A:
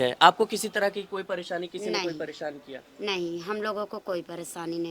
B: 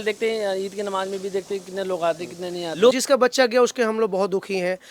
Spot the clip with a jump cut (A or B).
B